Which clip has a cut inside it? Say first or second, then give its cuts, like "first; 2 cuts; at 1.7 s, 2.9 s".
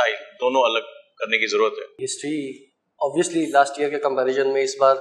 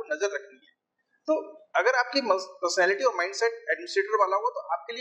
first; 1 cut; at 2.1 s